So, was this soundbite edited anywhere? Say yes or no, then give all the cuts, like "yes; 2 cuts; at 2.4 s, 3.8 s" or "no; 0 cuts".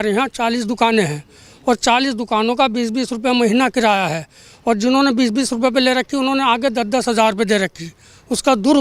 no; 0 cuts